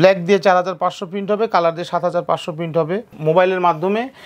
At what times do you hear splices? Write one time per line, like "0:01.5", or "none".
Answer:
0:03.1